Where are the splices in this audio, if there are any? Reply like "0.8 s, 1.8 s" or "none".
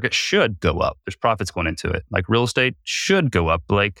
none